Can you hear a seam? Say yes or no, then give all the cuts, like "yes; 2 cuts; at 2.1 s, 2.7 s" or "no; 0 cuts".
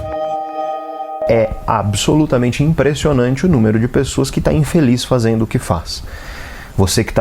yes; 1 cut; at 1.2 s